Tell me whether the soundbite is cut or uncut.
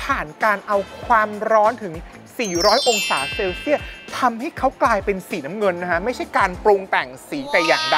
uncut